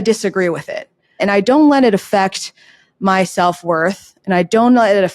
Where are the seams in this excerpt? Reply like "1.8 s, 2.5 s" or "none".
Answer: 1.2 s